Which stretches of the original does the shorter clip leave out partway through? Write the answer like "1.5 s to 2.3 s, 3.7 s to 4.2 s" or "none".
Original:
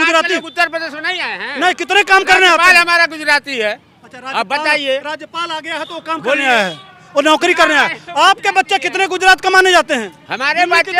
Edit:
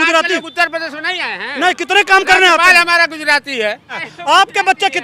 4.1 s to 8.0 s